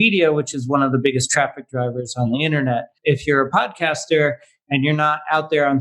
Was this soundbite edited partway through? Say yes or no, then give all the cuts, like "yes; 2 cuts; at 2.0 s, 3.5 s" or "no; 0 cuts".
yes; 1 cut; at 2.9 s